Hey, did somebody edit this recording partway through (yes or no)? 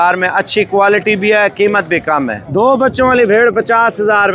yes